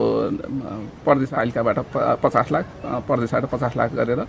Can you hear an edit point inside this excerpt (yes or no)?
yes